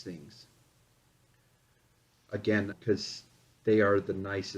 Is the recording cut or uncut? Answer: cut